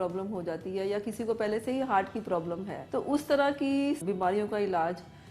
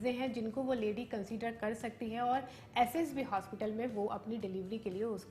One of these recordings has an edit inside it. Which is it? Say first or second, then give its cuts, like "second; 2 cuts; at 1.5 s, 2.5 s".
first; 2 cuts; at 2.8 s, 4.0 s